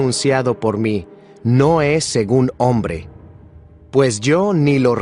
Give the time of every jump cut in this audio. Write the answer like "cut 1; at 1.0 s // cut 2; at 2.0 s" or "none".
none